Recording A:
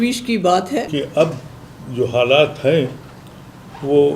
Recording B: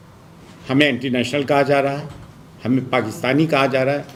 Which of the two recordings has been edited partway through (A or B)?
A